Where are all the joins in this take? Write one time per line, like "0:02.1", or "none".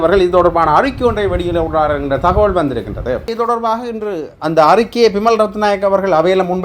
0:03.3

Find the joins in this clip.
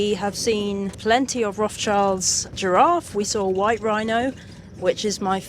0:00.9
0:02.5

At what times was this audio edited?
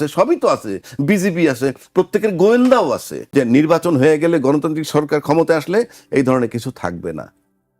0:03.2

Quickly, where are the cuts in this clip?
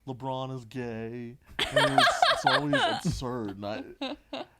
none

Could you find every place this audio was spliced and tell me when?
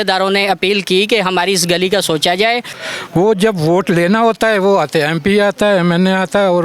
0:02.8

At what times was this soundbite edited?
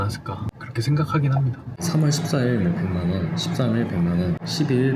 0:01.8

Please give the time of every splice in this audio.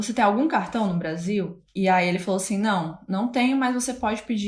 0:01.7

